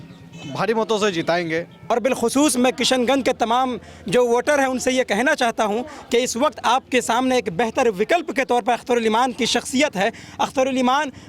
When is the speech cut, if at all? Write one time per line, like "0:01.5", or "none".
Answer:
0:01.9